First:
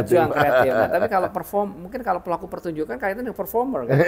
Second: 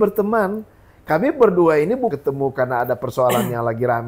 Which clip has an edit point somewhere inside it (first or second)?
second